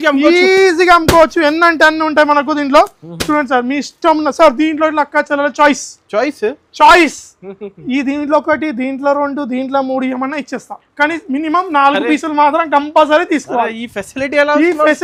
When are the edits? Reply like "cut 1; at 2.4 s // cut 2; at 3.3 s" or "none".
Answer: none